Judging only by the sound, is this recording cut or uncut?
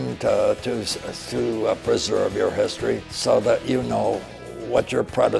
cut